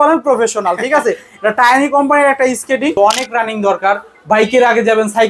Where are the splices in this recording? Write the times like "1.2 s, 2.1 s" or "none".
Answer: 2.9 s